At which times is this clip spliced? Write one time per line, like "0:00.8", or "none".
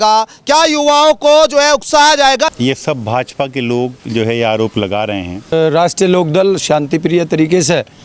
0:02.5
0:05.5